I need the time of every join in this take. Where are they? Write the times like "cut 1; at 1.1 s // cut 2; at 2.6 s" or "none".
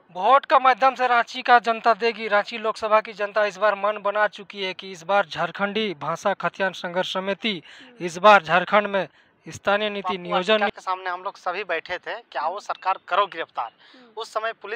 cut 1; at 10.6 s

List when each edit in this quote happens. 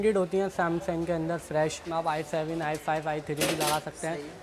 cut 1; at 1.8 s

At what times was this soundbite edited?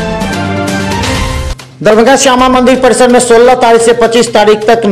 cut 1; at 1.6 s

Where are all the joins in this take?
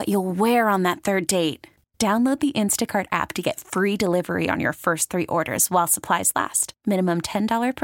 none

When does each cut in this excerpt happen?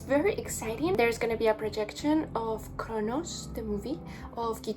cut 1; at 1.0 s

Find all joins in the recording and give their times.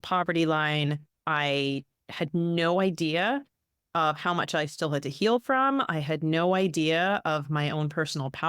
cut 1; at 1.1 s

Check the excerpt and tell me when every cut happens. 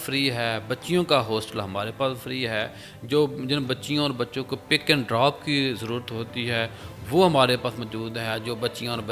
none

